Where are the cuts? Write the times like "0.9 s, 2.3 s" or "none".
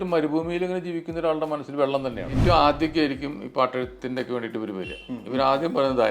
2.4 s